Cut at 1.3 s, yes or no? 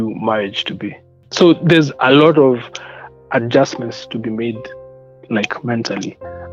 yes